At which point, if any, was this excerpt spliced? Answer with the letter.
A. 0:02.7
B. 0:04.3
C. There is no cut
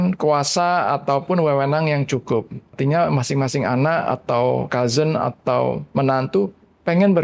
A